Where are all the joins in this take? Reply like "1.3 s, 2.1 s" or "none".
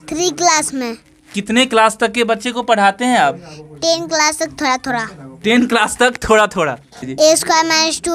7.1 s